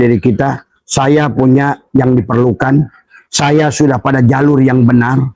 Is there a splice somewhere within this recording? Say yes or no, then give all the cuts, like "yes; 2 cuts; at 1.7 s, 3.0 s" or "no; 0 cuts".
no; 0 cuts